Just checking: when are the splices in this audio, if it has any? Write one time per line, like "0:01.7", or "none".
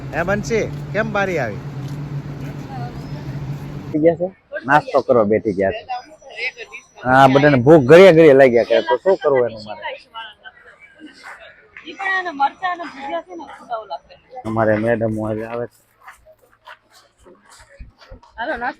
0:04.0
0:14.4